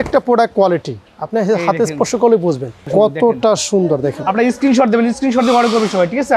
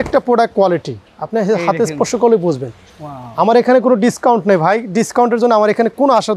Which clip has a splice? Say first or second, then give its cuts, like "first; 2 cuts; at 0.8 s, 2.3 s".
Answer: first; 1 cut; at 2.8 s